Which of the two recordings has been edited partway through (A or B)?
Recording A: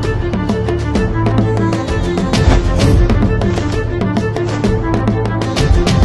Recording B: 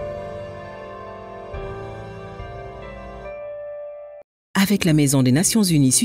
B